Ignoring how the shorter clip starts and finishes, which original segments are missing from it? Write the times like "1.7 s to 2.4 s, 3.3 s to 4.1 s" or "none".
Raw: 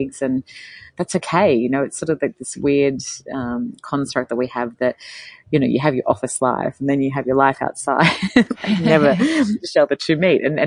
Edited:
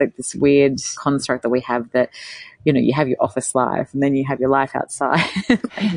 3.1 s to 3.8 s